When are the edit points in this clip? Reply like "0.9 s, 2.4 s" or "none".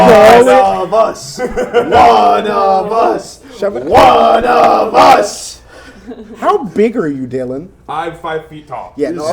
none